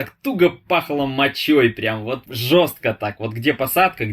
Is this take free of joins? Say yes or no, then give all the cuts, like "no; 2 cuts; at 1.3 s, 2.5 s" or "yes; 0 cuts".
no; 1 cut; at 2.3 s